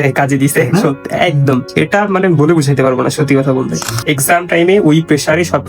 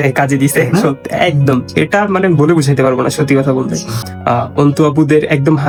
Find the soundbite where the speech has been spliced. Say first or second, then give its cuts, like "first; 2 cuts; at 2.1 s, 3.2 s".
first; 1 cut; at 4.0 s